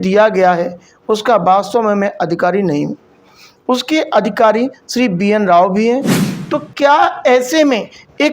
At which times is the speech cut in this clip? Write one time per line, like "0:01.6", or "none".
0:06.2